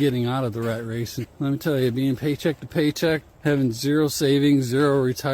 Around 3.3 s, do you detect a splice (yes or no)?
yes